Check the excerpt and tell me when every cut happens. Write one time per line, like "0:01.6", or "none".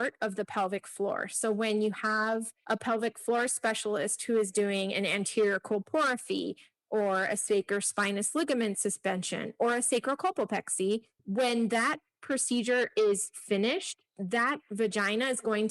0:02.5
0:11.2